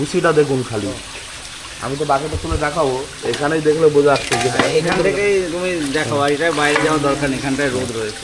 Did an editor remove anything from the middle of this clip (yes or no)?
no